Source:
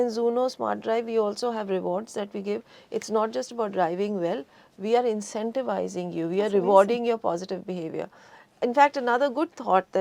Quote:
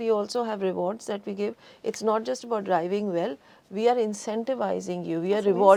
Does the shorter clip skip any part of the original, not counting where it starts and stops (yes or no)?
no